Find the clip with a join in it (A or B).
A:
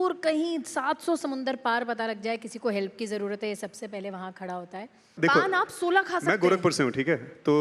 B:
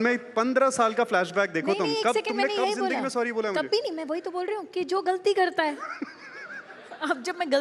A